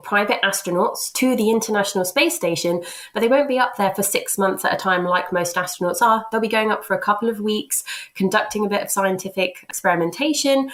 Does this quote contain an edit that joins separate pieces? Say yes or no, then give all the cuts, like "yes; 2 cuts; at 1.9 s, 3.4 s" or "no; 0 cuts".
no; 0 cuts